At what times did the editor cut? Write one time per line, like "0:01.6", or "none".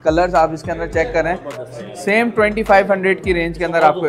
none